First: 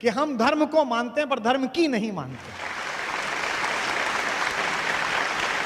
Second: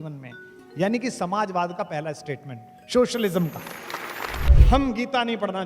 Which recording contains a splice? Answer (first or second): second